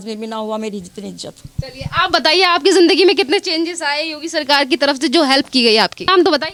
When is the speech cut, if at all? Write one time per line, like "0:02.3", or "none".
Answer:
none